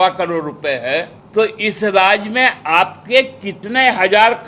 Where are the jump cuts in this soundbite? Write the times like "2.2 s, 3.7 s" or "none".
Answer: 1.2 s